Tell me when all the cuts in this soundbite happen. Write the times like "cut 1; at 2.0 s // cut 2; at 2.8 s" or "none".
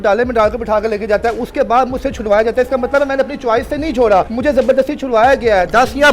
cut 1; at 4.3 s